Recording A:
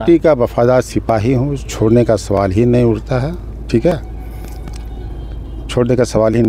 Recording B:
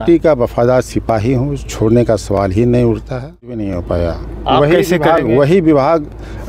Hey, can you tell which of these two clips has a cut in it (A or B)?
B